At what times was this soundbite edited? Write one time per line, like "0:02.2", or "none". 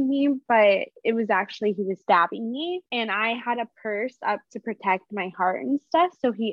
0:01.4
0:02.9